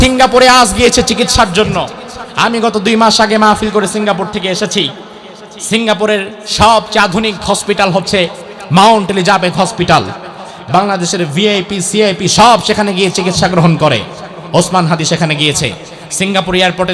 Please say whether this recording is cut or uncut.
uncut